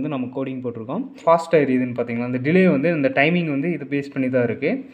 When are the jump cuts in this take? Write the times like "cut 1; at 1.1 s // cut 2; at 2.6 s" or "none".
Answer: cut 1; at 1.2 s